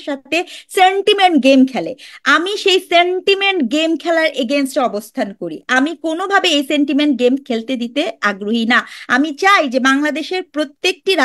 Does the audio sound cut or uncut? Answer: uncut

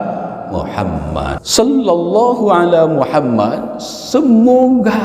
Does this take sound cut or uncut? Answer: cut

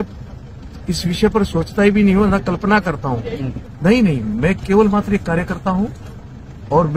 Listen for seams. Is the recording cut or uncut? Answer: cut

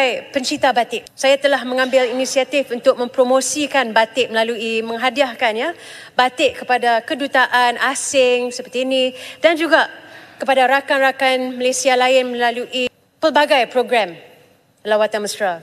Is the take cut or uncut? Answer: uncut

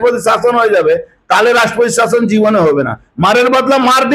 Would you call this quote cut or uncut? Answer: uncut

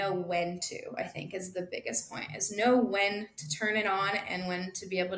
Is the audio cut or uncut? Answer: uncut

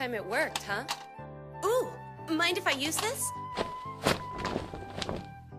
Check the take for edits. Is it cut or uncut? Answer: uncut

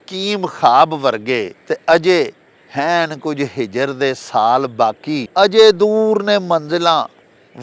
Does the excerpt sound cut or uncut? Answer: cut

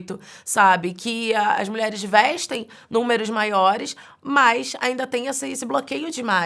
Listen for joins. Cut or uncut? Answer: uncut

